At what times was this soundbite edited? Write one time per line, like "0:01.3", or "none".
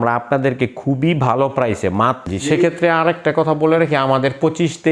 0:02.2